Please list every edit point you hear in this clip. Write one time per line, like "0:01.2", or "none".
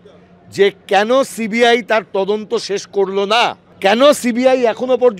0:03.7